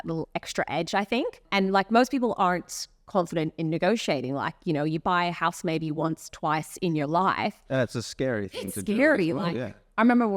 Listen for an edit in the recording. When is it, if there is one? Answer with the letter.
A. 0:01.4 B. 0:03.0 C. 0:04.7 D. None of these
A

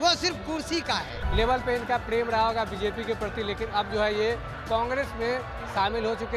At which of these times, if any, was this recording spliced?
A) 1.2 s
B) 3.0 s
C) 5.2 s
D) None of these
A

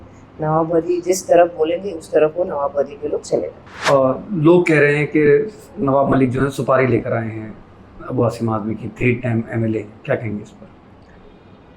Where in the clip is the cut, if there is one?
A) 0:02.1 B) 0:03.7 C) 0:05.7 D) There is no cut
B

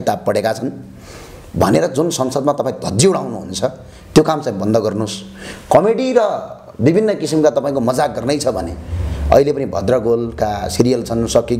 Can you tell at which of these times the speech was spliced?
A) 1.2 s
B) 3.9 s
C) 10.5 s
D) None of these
D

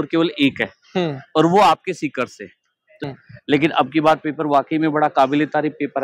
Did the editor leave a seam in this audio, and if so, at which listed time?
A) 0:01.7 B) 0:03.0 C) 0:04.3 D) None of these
B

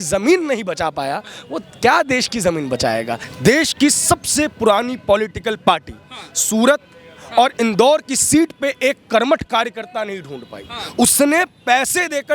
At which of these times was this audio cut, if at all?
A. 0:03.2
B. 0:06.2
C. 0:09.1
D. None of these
A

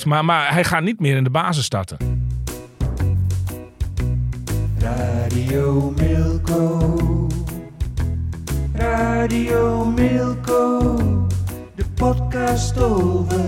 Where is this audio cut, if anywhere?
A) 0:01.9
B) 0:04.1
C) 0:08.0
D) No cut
A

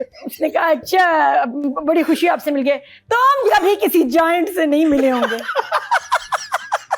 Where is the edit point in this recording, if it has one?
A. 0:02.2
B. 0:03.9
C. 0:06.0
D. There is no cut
D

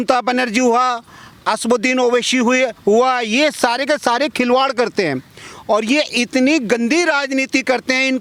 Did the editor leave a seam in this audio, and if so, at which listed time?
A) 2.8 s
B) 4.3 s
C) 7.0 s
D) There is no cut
D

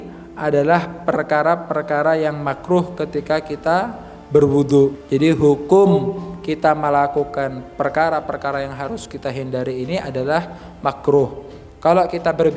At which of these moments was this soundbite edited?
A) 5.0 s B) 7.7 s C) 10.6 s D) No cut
A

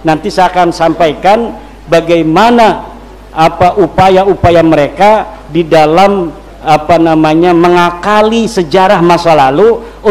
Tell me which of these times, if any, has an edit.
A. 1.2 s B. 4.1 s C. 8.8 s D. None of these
D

